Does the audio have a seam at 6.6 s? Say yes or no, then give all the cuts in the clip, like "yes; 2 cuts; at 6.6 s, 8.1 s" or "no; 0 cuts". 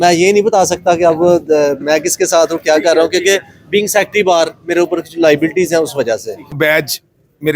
yes; 1 cut; at 6.6 s